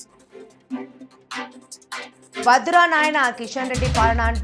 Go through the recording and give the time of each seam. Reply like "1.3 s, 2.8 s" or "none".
2.4 s

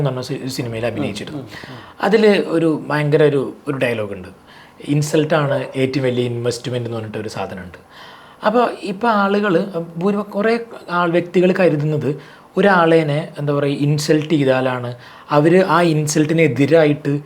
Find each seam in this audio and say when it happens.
none

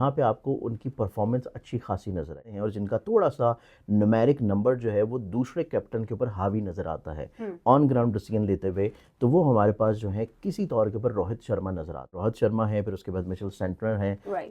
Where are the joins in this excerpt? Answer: 2.5 s, 12.2 s

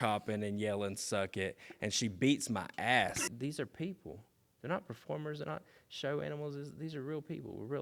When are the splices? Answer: 3.2 s

